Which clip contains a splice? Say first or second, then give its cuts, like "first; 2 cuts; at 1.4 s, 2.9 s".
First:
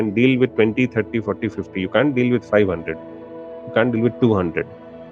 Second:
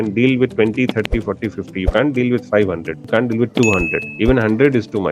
second; 2 cuts; at 2.9 s, 4.1 s